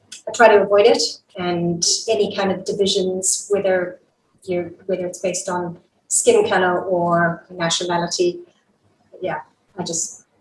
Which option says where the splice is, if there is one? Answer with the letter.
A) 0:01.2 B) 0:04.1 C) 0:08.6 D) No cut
A